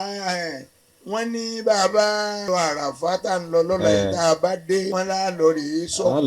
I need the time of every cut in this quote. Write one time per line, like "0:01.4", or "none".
0:02.4
0:04.9